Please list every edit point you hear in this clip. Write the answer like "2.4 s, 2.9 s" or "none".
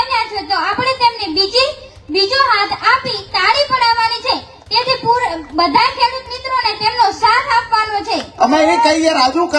8.3 s